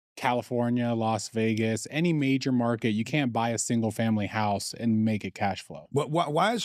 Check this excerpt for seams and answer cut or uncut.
cut